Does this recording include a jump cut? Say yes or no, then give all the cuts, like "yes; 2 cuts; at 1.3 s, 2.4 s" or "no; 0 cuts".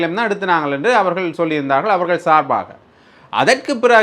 no; 0 cuts